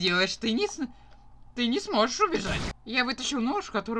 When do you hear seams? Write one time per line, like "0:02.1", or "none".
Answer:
0:02.8